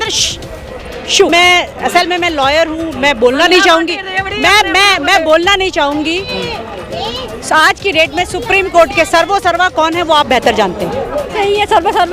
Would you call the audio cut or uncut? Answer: cut